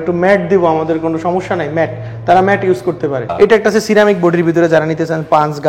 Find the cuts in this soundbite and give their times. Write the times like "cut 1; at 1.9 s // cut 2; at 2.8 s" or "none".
cut 1; at 3.3 s